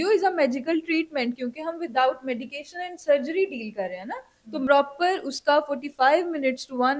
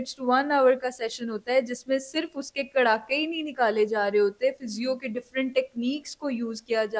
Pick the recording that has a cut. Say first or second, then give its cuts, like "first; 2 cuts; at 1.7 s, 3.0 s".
first; 1 cut; at 4.7 s